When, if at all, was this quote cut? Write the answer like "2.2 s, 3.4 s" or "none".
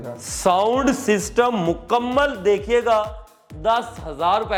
none